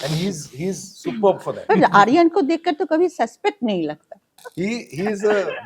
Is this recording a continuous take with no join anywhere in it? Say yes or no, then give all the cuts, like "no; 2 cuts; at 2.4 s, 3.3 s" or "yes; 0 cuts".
no; 2 cuts; at 1.7 s, 4.4 s